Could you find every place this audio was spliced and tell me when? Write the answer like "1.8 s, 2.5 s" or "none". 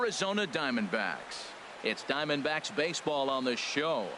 1.3 s